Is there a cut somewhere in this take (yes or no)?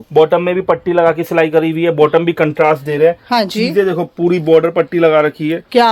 no